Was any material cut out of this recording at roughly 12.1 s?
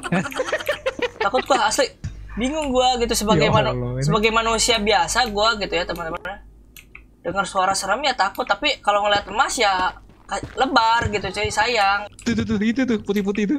yes; 2 cuts; at 2.1 s, 12.1 s

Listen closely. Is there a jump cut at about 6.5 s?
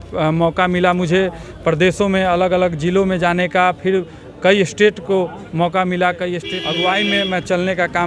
yes; 1 cut; at 6.5 s

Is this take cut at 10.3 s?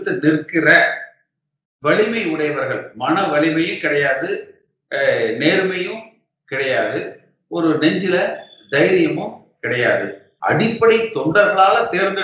yes; 1 cut; at 10.3 s

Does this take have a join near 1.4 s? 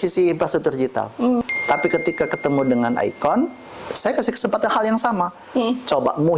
yes; 1 cut; at 1.4 s

